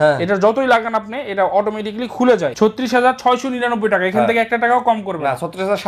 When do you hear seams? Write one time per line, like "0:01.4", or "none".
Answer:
0:02.5